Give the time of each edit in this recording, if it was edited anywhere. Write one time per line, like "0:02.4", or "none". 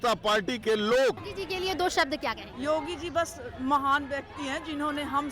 0:01.3
0:02.5